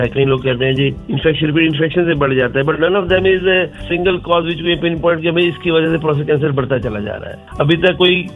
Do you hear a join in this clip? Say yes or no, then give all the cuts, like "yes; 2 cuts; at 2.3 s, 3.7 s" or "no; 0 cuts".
no; 0 cuts